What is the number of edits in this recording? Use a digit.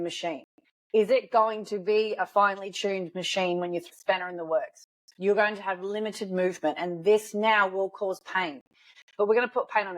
3